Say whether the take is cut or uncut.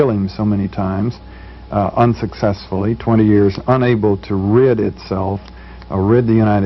cut